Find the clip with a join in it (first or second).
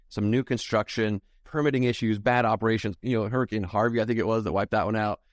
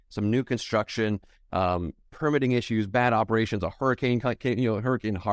first